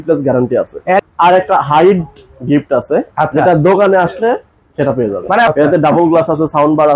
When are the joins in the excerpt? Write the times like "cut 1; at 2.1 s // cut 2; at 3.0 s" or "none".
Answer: cut 1; at 1.1 s // cut 2; at 5.5 s